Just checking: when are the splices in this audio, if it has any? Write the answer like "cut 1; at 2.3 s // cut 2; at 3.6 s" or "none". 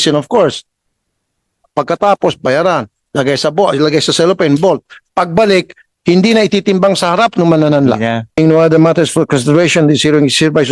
cut 1; at 8.4 s

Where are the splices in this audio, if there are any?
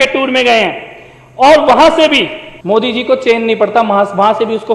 cut 1; at 2.5 s

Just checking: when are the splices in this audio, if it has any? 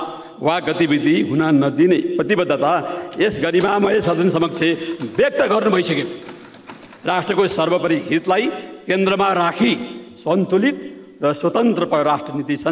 none

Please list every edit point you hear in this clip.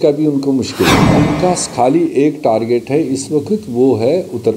cut 1; at 1.0 s

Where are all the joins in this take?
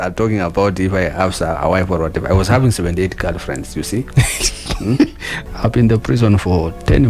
cut 1; at 5.4 s

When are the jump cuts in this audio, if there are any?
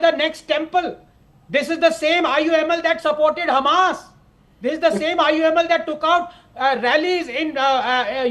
none

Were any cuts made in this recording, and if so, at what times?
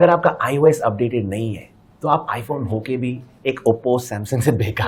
none

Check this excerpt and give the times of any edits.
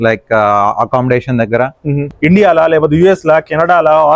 cut 1; at 2.1 s

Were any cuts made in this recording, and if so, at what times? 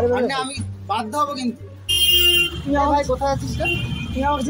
cut 1; at 1.8 s

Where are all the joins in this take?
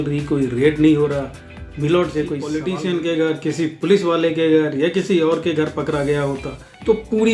cut 1; at 2.6 s

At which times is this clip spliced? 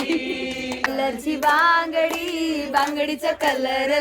cut 1; at 0.9 s

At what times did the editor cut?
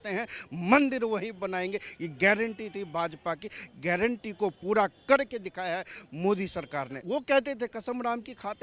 none

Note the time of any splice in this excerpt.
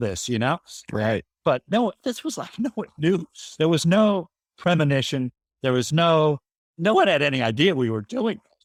none

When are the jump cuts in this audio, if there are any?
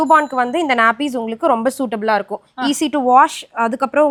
none

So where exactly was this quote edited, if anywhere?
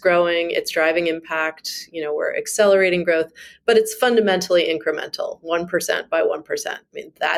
none

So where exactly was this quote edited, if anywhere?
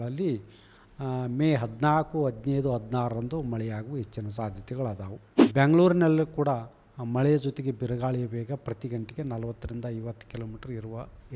cut 1; at 5.3 s

